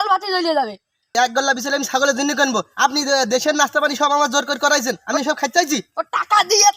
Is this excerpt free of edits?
no; 1 cut; at 1.0 s

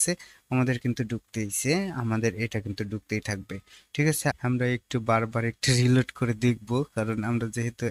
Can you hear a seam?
yes; 1 cut; at 4.4 s

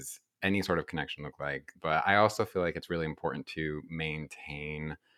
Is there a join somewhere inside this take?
yes; 1 cut; at 1.7 s

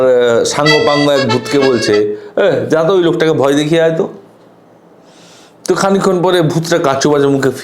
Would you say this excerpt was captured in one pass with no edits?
yes; 0 cuts

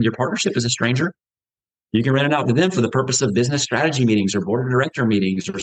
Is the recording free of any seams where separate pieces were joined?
yes; 0 cuts

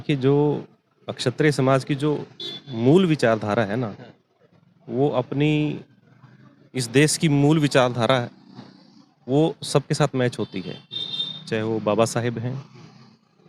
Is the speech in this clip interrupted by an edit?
no; 0 cuts

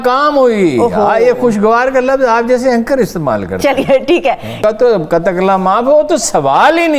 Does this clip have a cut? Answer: yes; 1 cut; at 4.5 s

